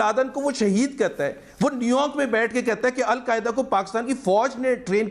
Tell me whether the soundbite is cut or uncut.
uncut